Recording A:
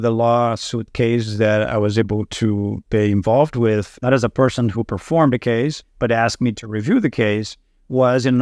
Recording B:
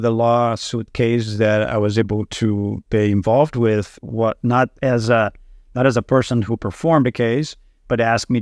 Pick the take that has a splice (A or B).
A